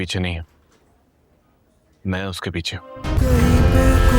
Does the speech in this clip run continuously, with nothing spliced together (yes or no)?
no